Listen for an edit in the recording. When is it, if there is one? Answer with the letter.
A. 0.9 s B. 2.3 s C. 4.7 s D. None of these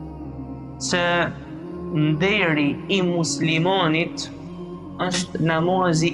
A